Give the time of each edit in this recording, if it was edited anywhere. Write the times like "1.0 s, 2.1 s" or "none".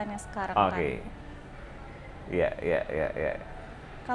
none